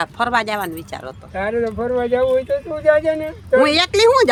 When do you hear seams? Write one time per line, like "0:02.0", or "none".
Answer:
none